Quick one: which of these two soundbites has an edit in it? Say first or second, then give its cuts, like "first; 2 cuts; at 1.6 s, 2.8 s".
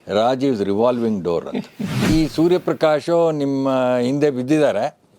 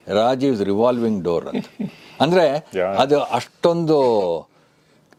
first; 1 cut; at 2.1 s